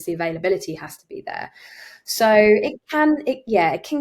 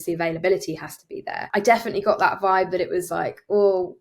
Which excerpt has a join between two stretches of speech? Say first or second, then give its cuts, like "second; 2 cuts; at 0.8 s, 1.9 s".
second; 1 cut; at 1.4 s